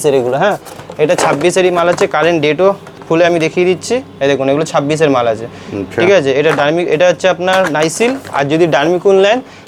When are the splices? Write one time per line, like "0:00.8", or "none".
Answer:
none